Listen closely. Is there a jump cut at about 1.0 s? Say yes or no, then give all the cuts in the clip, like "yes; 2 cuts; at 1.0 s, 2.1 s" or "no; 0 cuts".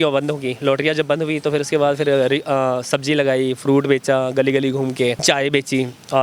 no; 1 cut; at 5.2 s